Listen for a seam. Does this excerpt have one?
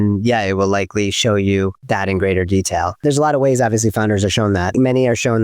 yes; 3 cuts; at 1.8 s, 3.0 s, 4.7 s

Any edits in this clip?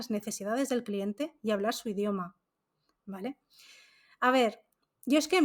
no; 0 cuts

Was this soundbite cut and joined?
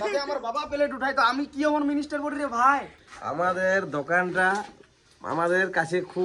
yes; 1 cut; at 2.9 s

